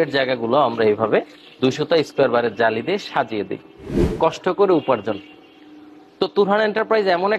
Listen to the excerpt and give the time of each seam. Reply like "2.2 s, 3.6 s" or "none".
4.0 s